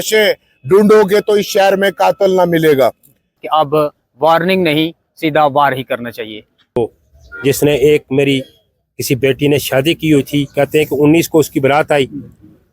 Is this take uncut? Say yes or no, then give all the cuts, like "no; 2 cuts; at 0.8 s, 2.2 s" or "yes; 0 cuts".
no; 2 cuts; at 3.4 s, 6.8 s